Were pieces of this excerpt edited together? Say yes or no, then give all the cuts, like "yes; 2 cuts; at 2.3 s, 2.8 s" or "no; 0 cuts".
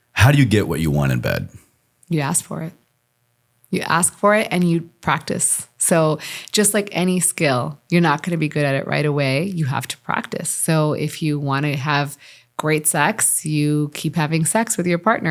no; 0 cuts